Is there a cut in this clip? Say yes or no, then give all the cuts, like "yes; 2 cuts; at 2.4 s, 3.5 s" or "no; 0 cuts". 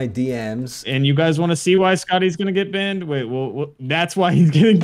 yes; 1 cut; at 1.0 s